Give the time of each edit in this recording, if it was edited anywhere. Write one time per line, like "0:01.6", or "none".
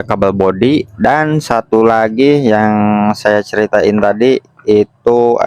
none